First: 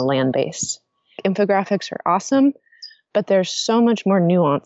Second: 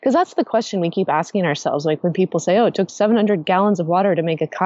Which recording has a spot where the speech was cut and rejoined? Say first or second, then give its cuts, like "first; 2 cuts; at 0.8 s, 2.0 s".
first; 1 cut; at 1.2 s